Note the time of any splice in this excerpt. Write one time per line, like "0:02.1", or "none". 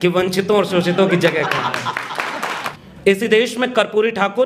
0:02.7